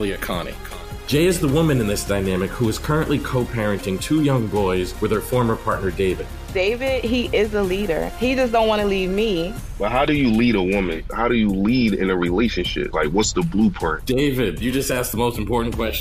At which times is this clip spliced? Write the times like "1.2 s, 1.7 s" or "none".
none